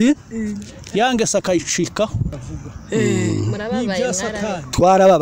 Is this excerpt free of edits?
no; 1 cut; at 2.4 s

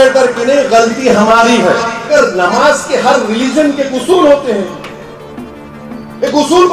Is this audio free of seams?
no; 1 cut; at 2.1 s

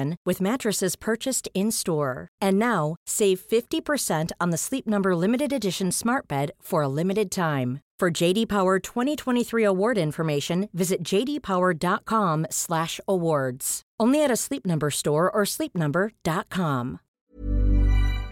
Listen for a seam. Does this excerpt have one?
yes; 1 cut; at 17.1 s

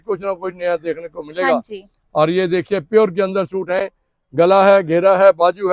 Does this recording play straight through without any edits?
yes; 0 cuts

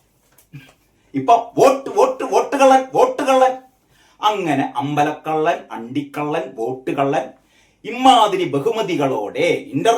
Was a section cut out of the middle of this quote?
no; 0 cuts

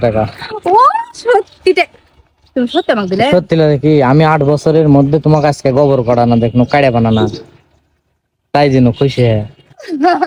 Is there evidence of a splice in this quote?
no; 0 cuts

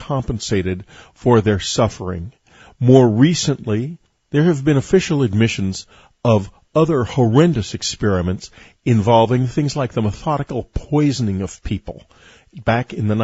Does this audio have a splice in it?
yes; 1 cut; at 9.0 s

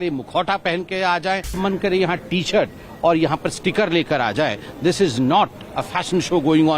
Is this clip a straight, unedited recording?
no; 1 cut; at 1.6 s

